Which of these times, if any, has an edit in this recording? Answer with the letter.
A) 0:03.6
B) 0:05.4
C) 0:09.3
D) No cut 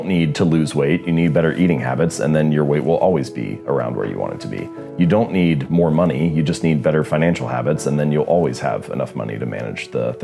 D